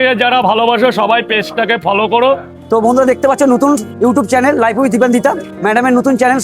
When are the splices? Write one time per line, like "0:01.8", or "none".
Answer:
0:02.5
0:03.9
0:05.5